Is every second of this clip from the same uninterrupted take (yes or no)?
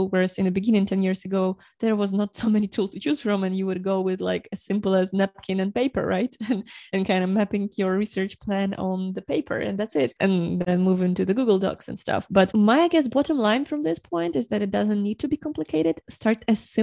yes